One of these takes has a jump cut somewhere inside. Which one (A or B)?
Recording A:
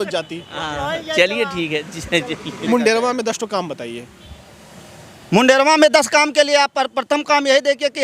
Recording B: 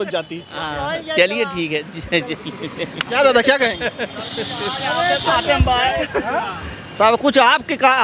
A